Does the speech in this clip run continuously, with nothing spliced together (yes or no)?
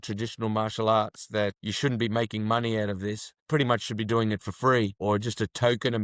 no